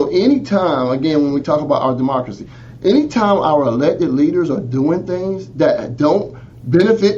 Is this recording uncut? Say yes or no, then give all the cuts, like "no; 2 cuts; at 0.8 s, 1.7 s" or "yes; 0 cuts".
yes; 0 cuts